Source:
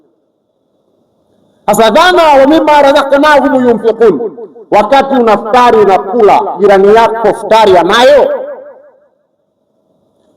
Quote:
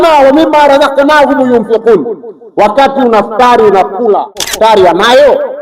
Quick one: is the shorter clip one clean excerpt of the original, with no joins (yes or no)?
no